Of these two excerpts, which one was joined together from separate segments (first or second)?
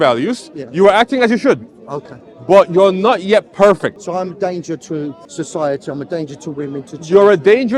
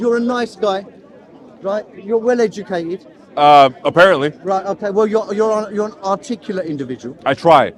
first